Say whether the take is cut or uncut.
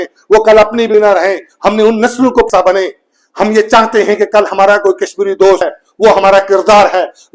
cut